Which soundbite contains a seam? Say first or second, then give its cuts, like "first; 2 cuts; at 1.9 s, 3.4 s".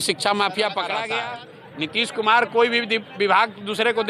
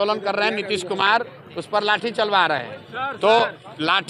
first; 1 cut; at 1.2 s